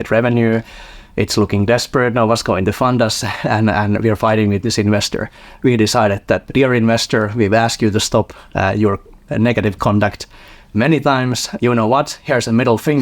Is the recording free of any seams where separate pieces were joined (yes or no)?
no